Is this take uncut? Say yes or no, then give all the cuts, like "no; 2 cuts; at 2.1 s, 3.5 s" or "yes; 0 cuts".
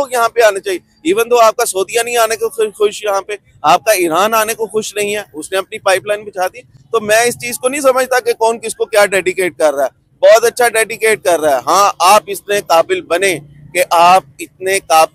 yes; 0 cuts